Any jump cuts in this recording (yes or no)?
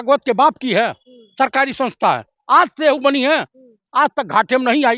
no